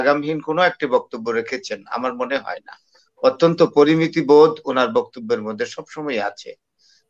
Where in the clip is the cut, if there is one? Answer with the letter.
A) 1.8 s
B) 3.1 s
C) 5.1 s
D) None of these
D